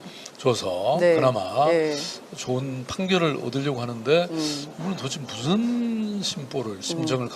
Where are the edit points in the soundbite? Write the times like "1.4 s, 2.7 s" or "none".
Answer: 3.4 s